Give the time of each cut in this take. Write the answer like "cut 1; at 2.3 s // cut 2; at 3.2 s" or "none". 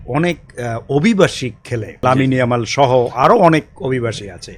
cut 1; at 2.0 s